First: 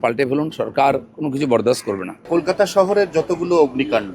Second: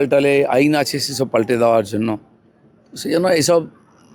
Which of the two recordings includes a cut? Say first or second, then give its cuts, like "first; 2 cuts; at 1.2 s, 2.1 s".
first; 1 cut; at 2.3 s